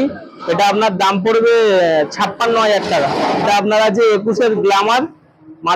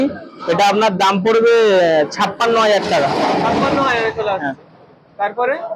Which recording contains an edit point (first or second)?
first